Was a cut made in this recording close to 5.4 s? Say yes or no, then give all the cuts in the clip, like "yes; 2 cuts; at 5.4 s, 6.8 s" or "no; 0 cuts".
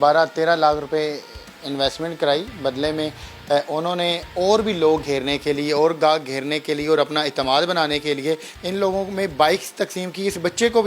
no; 1 cut; at 8.6 s